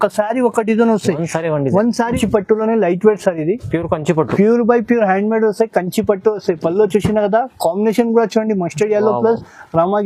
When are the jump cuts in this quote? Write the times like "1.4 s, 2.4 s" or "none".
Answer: 2.1 s